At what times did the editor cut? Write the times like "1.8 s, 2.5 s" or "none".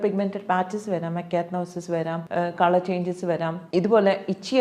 2.2 s, 3.6 s